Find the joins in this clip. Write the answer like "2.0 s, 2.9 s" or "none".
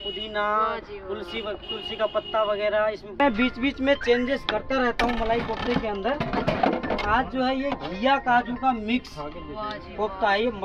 3.2 s